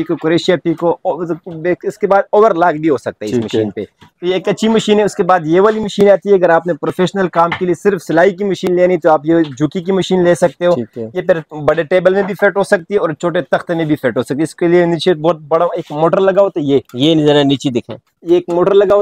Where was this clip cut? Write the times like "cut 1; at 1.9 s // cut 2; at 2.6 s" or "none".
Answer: none